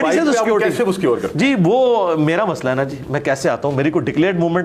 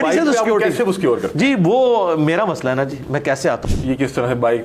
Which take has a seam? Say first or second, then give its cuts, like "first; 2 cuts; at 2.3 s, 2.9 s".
second; 1 cut; at 3.6 s